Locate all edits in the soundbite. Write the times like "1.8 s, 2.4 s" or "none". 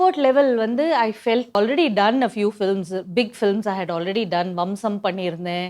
1.6 s